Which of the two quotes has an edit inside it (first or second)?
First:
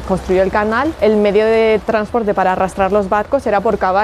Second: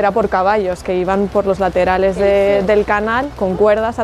first